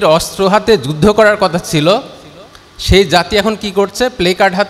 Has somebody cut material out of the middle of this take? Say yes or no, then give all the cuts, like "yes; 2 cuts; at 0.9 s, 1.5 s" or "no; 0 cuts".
no; 0 cuts